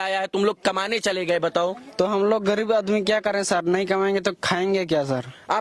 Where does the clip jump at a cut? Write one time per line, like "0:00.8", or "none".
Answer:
none